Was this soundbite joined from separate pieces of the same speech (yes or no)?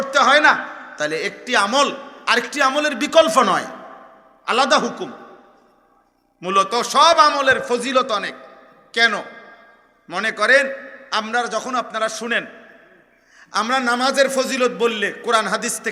no